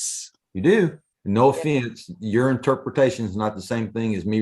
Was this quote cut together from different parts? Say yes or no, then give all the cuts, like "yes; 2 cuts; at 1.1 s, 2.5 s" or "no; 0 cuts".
yes; 1 cut; at 1.1 s